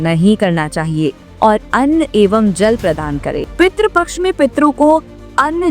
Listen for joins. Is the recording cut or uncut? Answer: cut